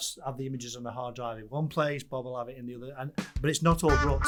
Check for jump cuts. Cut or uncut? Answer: uncut